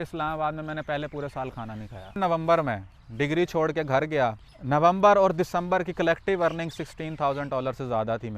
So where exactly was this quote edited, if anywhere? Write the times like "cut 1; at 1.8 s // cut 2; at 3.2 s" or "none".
cut 1; at 2.2 s // cut 2; at 4.5 s